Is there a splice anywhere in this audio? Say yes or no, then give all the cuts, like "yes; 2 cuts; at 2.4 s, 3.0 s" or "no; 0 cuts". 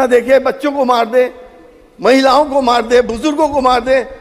no; 0 cuts